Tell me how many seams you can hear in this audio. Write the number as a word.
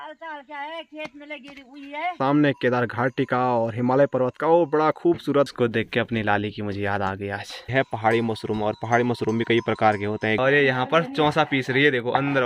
four